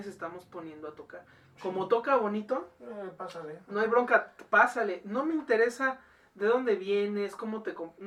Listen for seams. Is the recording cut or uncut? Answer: uncut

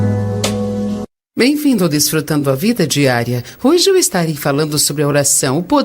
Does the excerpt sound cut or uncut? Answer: cut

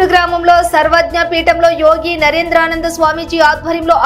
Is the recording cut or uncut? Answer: uncut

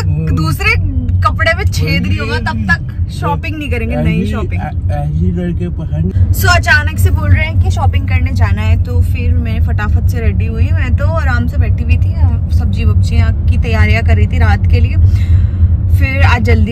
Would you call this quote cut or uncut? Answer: uncut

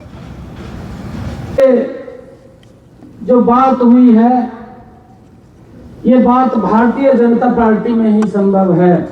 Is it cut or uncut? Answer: cut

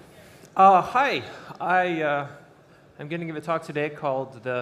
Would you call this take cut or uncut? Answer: uncut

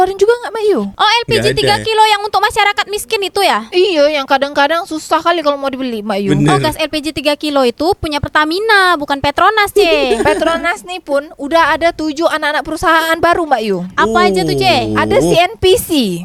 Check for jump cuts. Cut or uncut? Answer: uncut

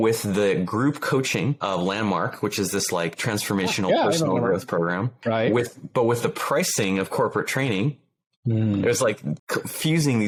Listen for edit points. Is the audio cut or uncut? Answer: uncut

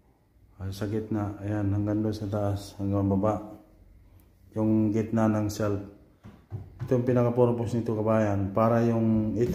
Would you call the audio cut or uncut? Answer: uncut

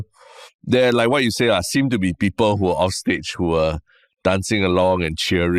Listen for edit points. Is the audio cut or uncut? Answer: uncut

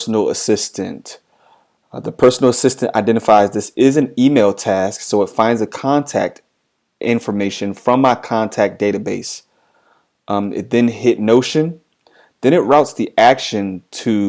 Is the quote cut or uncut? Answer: uncut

